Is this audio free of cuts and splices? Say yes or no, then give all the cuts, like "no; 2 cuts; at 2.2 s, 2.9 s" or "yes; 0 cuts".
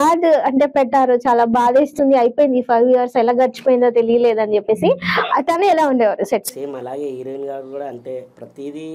no; 1 cut; at 6.5 s